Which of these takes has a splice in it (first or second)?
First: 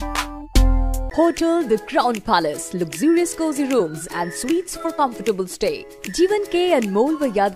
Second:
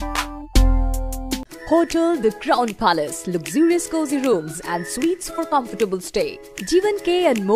first